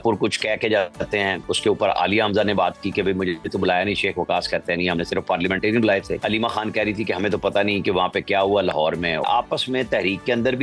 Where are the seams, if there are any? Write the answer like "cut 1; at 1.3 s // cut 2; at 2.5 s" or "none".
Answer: cut 1; at 1.4 s // cut 2; at 3.4 s // cut 3; at 6.1 s // cut 4; at 9.2 s